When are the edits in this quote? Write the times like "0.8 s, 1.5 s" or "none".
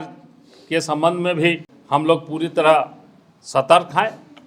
1.7 s